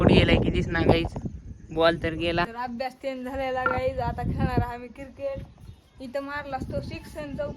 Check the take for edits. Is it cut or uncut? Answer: cut